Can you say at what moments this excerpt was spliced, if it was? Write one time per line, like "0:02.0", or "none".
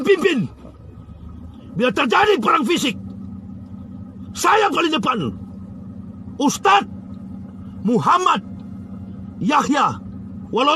none